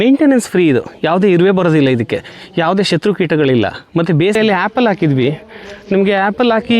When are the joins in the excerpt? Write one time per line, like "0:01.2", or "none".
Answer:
0:04.4